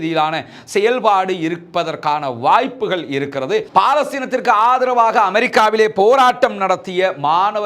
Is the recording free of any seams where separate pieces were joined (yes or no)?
no